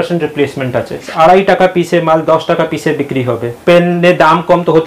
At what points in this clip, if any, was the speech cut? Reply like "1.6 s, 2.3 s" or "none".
1.1 s, 3.5 s